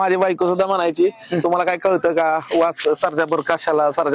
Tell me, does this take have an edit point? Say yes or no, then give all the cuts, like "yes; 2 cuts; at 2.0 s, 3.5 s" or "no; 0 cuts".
no; 0 cuts